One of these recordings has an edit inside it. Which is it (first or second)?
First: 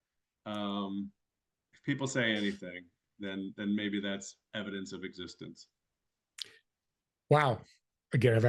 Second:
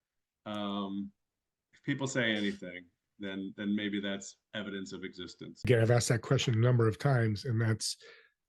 second